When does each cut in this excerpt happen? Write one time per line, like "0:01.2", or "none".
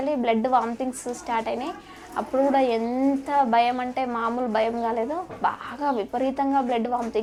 none